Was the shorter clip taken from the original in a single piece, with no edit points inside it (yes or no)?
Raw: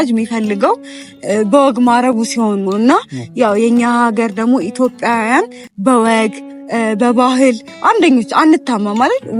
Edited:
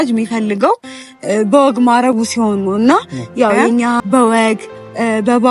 no